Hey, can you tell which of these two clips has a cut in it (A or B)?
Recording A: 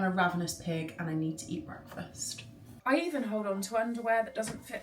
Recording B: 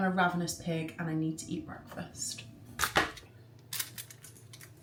A